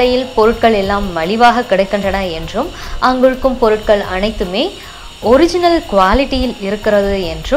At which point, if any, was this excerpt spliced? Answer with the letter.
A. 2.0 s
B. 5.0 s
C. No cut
C